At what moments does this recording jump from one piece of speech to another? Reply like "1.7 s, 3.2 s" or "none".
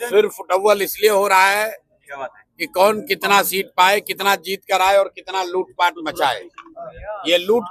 none